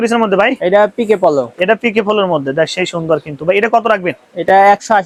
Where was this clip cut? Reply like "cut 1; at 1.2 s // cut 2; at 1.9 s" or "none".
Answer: none